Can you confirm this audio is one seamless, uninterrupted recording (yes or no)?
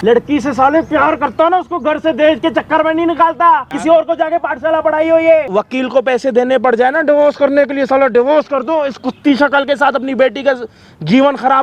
no